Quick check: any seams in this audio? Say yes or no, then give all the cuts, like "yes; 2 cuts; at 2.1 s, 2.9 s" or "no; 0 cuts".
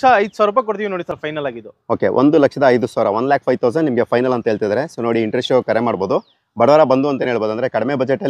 no; 0 cuts